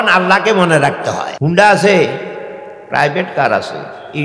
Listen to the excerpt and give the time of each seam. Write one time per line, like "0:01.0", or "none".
0:01.3